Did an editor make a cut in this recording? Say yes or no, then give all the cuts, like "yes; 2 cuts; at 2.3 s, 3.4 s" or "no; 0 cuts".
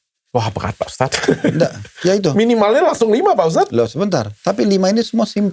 no; 0 cuts